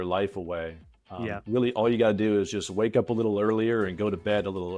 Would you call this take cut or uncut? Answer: uncut